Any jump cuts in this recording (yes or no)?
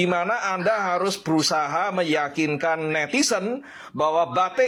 no